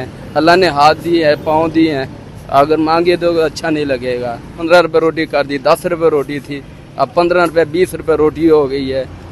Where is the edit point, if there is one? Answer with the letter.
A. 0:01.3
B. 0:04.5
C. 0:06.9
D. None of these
B